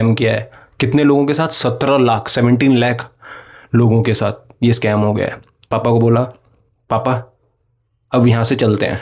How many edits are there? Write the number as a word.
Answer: one